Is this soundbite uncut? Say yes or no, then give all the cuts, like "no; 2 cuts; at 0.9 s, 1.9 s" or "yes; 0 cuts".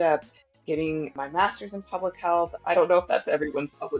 no; 2 cuts; at 1.1 s, 2.5 s